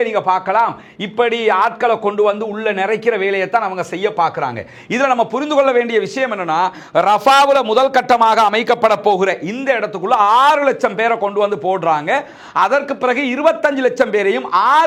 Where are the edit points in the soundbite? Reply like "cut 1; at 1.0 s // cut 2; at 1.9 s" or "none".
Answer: none